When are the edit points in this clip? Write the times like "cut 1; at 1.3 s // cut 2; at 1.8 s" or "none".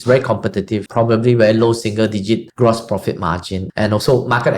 cut 1; at 0.9 s // cut 2; at 2.5 s // cut 3; at 3.6 s